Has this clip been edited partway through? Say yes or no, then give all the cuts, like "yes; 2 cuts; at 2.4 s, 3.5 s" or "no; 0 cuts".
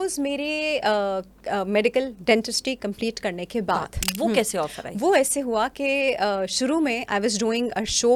no; 0 cuts